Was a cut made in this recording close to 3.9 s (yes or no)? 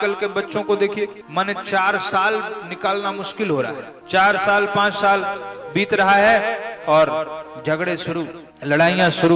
yes